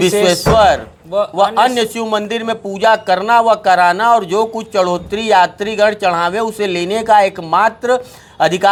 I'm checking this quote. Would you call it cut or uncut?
uncut